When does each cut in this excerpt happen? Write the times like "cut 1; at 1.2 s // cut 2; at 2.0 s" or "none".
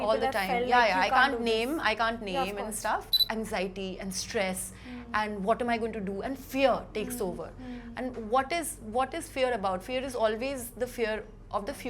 cut 1; at 3.2 s